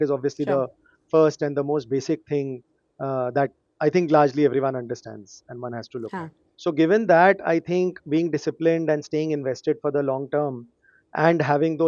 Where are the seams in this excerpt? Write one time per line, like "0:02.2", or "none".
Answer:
0:06.4